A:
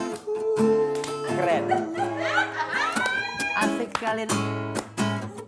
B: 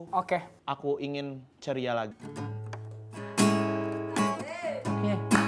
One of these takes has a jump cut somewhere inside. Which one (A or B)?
B